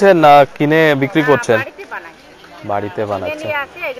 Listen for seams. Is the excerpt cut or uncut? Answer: uncut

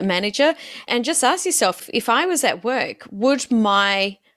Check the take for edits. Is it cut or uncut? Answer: cut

